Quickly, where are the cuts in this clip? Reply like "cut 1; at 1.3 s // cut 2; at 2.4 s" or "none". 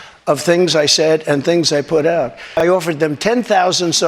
cut 1; at 2.5 s